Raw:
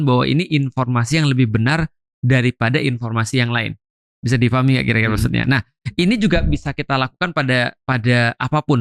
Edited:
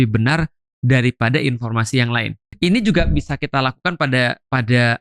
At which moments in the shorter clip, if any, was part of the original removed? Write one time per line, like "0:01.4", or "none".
0:02.4

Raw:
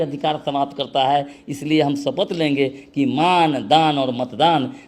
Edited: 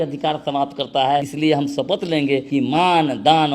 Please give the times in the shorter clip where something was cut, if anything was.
0:01.3
0:02.4

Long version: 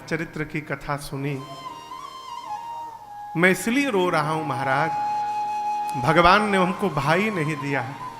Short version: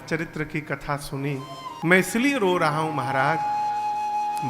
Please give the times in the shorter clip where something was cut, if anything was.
0:01.8

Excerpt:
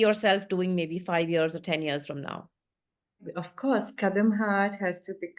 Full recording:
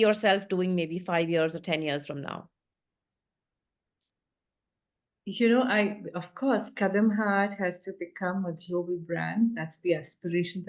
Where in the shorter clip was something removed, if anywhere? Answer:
0:03.2

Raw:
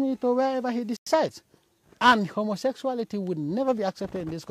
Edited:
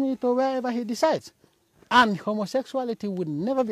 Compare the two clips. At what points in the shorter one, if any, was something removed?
0:01.0

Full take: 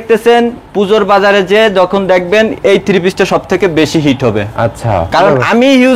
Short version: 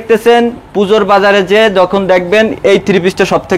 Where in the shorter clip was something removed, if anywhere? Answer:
none

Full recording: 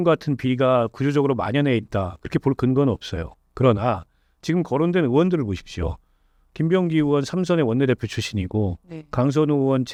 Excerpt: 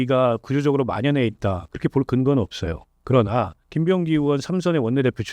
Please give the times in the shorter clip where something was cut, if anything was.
0:03.6

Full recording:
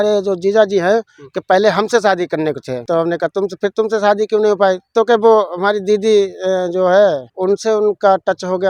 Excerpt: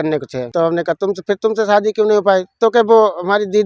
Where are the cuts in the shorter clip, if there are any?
none

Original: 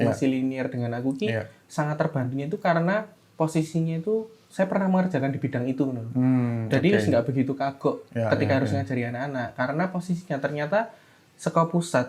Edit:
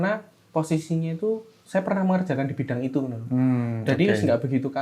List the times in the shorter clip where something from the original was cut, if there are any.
none

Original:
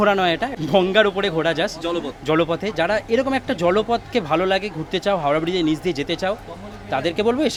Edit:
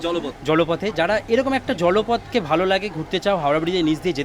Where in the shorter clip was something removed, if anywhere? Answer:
none

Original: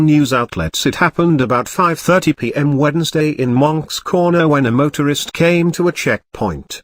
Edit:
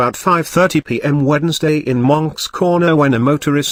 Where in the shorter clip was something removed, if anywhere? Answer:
none

